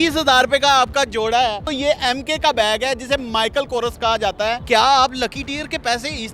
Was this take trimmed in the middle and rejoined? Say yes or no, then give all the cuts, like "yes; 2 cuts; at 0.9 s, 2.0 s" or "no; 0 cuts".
yes; 2 cuts; at 1.7 s, 4.6 s